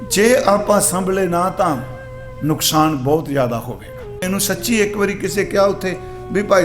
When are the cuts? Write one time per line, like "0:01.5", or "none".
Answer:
0:04.2